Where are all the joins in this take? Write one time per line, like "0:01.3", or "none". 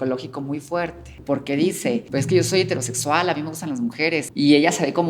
0:01.1
0:02.1
0:04.3